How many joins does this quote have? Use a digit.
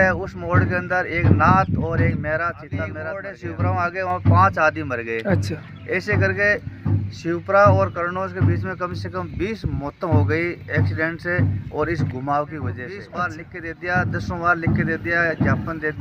2